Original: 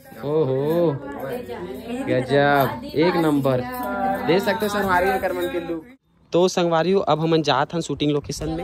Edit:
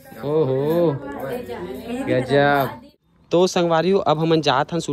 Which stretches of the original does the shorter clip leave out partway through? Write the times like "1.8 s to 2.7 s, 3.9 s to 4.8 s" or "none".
2.8 s to 5.8 s